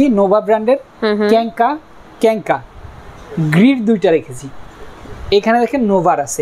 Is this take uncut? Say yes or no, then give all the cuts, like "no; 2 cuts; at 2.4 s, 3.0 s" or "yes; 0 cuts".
yes; 0 cuts